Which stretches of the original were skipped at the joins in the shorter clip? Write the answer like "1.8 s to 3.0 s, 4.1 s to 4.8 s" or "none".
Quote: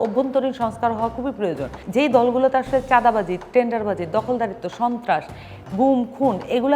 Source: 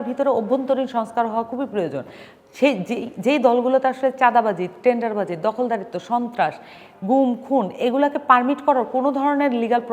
2.1 s to 3.1 s